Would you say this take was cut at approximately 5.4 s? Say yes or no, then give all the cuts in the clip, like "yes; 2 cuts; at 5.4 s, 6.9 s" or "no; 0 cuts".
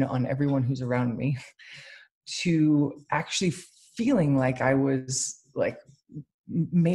no; 0 cuts